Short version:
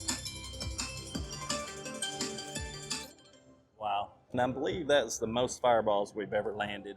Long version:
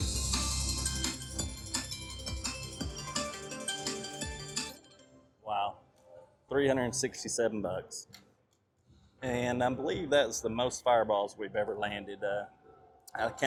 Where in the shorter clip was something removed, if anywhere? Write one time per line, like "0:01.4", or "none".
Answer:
0:04.3